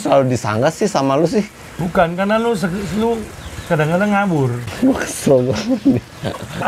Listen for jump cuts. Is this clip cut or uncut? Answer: uncut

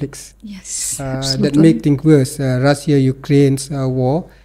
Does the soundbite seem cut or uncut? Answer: uncut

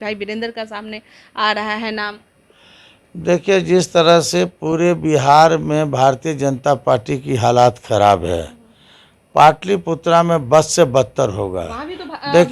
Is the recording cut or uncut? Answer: uncut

